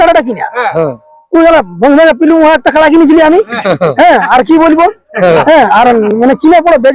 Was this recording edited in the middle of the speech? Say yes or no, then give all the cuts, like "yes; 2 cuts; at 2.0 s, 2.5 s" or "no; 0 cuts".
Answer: no; 0 cuts